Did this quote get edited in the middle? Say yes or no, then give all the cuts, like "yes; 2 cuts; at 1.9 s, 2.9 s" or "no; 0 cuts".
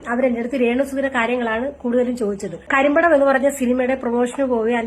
yes; 1 cut; at 2.7 s